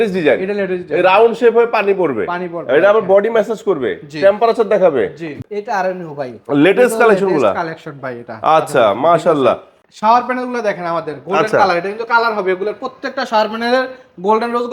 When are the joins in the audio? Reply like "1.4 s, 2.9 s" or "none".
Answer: 5.4 s, 9.8 s